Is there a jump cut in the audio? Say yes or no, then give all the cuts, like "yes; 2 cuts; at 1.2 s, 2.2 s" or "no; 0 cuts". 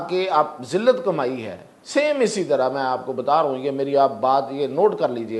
no; 0 cuts